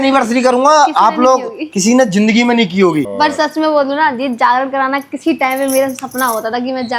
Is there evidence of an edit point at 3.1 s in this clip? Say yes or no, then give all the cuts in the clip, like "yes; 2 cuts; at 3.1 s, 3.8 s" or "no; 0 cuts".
yes; 1 cut; at 3.1 s